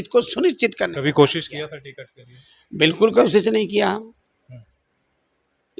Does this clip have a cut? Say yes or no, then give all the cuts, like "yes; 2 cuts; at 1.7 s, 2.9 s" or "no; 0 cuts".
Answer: no; 0 cuts